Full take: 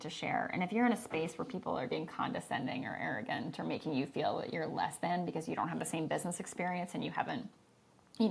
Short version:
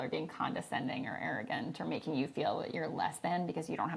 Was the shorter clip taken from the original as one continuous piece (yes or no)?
yes